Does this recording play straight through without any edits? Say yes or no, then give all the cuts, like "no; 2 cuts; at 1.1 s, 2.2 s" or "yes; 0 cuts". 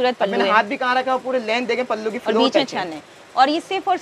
yes; 0 cuts